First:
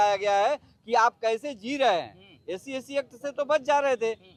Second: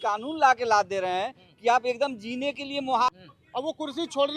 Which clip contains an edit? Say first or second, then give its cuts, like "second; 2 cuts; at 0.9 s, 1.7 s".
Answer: second; 1 cut; at 3.2 s